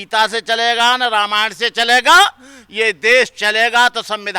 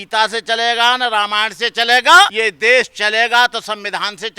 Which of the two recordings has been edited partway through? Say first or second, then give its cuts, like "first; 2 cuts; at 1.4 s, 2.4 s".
second; 1 cut; at 2.3 s